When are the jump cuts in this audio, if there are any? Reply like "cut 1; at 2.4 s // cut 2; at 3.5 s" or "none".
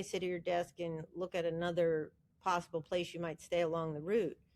none